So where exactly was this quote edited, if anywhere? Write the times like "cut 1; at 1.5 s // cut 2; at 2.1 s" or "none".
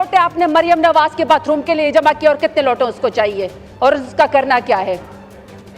none